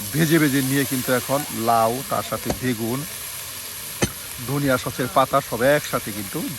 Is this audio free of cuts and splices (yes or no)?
yes